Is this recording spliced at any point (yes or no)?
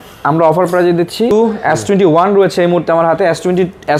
yes